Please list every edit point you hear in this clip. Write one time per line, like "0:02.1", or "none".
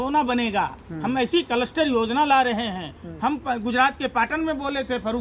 none